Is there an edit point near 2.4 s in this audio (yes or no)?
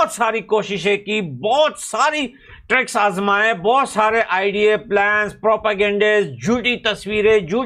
no